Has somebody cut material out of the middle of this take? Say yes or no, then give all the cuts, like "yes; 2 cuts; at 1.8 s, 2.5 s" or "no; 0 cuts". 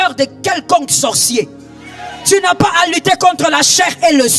no; 0 cuts